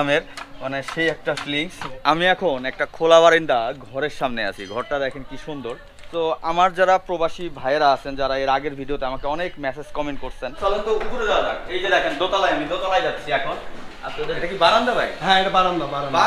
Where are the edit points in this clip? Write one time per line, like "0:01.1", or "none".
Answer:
0:01.8
0:05.9
0:10.5
0:14.4